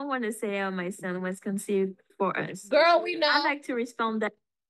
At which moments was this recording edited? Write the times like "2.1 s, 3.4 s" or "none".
none